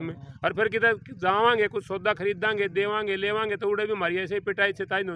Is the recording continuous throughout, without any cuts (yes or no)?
yes